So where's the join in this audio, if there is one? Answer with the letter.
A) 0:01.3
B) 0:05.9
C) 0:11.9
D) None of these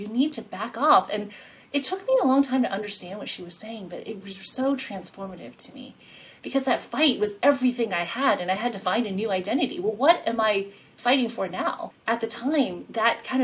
C